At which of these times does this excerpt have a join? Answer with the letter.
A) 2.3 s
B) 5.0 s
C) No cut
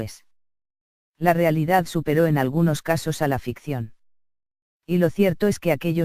C